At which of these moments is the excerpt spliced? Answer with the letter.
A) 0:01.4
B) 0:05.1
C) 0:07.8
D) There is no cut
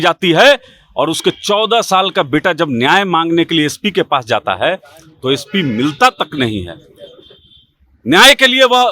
D